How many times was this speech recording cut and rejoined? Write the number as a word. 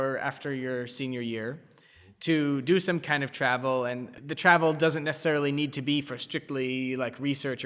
zero